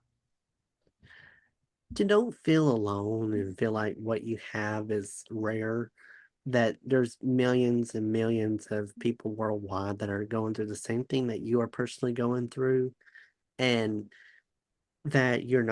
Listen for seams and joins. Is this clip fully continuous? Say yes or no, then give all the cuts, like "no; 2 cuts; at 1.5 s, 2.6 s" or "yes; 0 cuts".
yes; 0 cuts